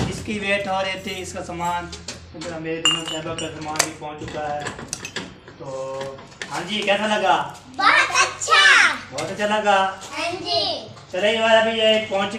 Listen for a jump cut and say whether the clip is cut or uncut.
uncut